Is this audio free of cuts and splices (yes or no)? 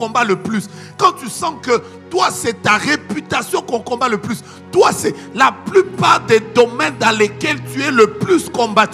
yes